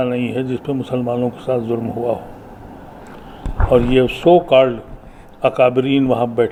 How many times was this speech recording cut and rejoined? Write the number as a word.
zero